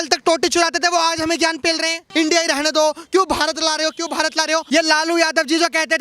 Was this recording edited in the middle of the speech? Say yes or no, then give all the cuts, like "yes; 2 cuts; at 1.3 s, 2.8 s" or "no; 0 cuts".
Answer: yes; 2 cuts; at 2.0 s, 4.6 s